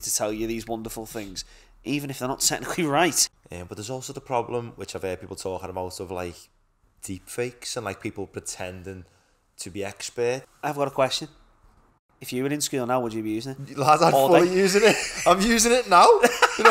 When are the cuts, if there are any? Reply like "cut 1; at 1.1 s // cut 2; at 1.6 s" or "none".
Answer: cut 1; at 3.2 s // cut 2; at 10.5 s